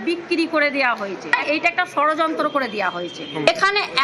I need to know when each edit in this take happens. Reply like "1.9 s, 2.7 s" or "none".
1.3 s